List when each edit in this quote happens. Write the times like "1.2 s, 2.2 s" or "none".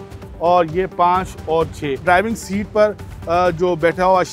2.0 s